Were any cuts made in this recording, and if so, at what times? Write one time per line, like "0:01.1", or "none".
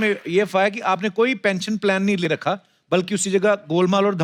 none